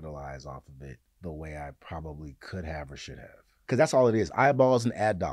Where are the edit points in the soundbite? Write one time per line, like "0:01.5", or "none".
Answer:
0:01.1
0:03.6